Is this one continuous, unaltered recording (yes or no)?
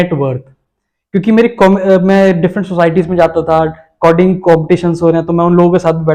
yes